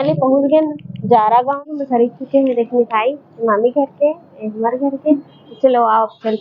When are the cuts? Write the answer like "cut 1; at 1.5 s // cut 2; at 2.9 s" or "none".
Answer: cut 1; at 1.6 s